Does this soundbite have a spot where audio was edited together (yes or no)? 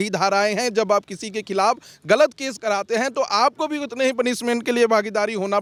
no